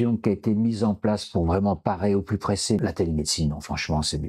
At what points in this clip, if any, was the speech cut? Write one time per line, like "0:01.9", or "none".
0:02.8